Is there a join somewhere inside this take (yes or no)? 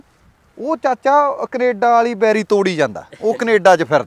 no